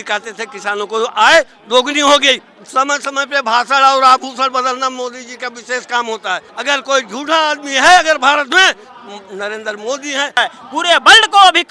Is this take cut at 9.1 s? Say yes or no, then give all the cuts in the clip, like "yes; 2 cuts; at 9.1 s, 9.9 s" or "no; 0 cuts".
no; 3 cuts; at 2.5 s, 6.5 s, 10.4 s